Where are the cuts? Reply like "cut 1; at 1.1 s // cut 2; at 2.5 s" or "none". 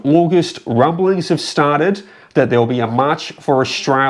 none